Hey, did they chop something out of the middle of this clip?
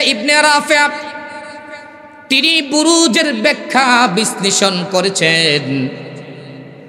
no; 0 cuts

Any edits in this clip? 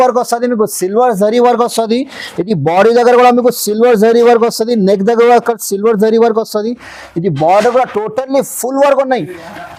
no; 0 cuts

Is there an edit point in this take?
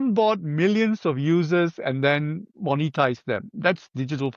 yes; 1 cut; at 3.4 s

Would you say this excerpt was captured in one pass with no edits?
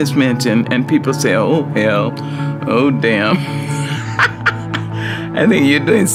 yes; 0 cuts

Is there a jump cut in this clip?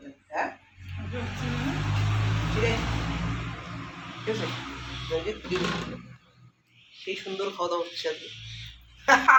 no; 0 cuts

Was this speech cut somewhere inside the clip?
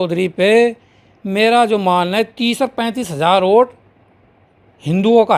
no; 0 cuts

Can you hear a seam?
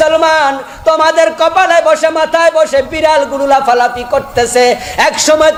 no; 0 cuts

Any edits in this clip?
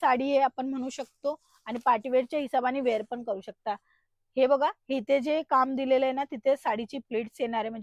no; 0 cuts

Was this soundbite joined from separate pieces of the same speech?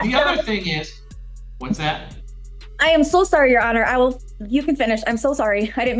no; 0 cuts

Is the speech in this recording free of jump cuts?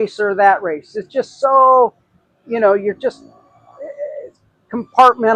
yes; 0 cuts

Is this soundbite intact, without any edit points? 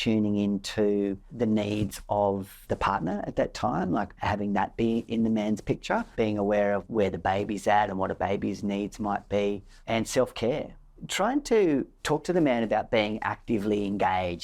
no; 7 cuts; at 1.2 s, 2.6 s, 4.2 s, 5.1 s, 6.1 s, 9.7 s, 10.8 s

